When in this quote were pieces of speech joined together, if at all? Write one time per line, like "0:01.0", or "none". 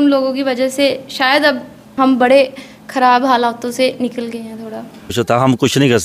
0:01.8
0:05.1